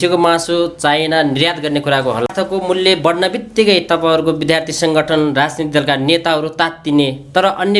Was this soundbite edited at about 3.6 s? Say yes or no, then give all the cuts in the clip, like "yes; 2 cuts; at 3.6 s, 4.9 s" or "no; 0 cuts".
no; 1 cut; at 2.3 s